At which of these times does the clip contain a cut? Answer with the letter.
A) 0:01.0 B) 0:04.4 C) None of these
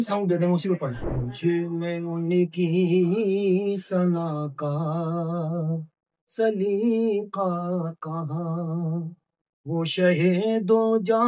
A